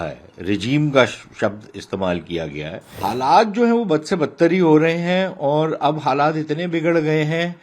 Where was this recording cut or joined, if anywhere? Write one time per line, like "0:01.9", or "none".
0:03.0